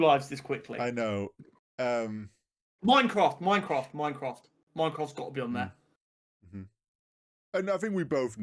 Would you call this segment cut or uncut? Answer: cut